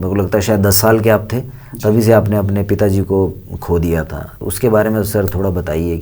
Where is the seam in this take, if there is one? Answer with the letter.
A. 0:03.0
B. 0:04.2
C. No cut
C